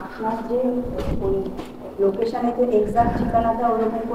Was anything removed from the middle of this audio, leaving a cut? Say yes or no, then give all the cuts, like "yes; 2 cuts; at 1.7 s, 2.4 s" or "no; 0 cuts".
no; 0 cuts